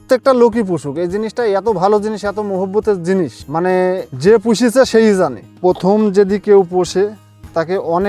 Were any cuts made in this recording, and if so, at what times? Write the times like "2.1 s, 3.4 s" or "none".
3.6 s, 5.4 s